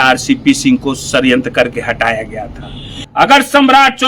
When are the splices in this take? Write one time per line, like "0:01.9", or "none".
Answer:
0:03.0